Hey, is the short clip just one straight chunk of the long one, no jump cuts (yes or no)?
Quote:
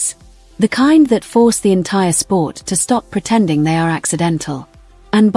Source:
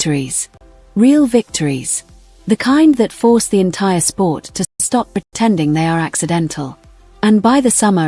no